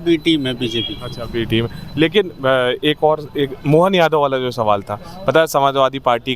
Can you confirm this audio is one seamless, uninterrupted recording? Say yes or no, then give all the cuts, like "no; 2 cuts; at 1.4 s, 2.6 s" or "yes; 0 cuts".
yes; 0 cuts